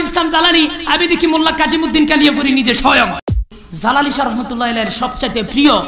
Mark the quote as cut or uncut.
cut